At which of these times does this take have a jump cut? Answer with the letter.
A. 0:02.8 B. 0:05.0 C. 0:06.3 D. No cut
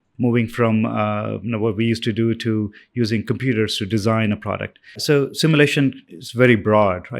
B